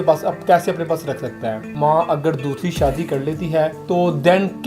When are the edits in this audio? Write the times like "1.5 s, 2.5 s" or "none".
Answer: 1.7 s, 3.8 s